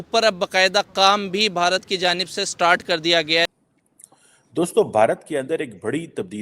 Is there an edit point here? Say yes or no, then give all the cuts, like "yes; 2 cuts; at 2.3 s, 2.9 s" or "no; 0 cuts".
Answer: yes; 1 cut; at 3.5 s